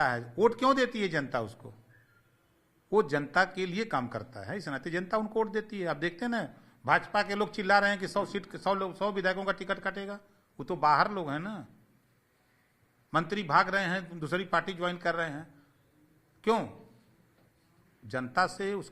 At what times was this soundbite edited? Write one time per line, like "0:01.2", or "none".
none